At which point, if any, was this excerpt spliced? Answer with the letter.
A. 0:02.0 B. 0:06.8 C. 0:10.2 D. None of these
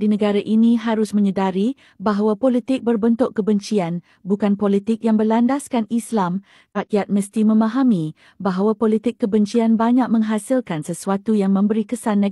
B